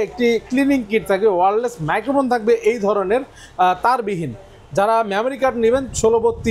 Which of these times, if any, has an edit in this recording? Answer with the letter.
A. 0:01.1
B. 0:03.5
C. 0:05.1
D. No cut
D